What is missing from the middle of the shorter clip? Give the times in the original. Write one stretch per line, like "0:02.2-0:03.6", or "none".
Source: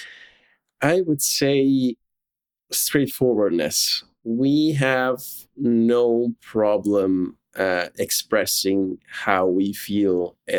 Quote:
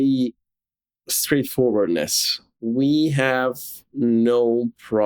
none